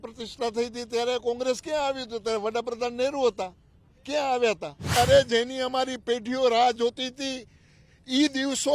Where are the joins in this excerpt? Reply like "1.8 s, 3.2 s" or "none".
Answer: 5.0 s